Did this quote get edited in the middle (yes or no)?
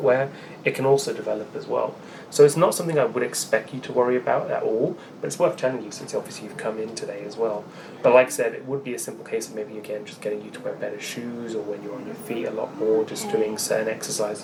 no